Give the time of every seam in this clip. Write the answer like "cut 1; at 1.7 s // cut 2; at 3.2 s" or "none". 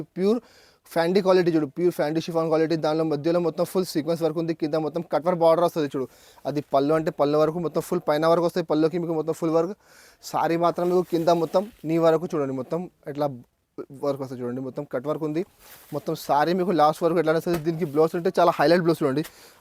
none